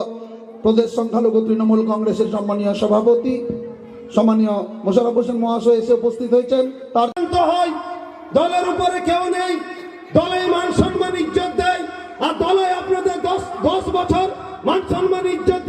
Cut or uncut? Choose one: cut